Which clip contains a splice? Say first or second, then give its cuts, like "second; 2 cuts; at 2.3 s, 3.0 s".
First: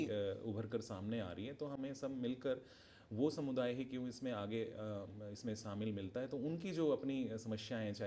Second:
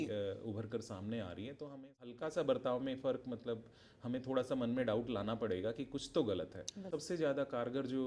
second; 2 cuts; at 2.1 s, 6.9 s